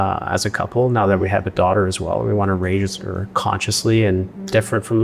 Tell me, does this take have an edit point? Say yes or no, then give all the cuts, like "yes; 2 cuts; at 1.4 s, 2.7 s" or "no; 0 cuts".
no; 0 cuts